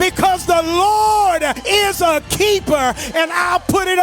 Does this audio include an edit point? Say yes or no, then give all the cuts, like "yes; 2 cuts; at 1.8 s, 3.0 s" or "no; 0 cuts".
yes; 1 cut; at 1.6 s